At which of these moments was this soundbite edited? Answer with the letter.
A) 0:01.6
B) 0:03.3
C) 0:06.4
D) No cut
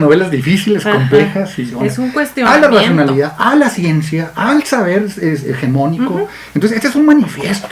A